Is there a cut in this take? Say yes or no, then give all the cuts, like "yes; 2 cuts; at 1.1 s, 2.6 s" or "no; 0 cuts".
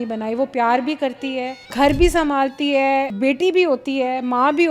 yes; 2 cuts; at 1.7 s, 3.1 s